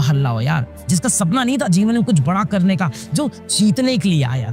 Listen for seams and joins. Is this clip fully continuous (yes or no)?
no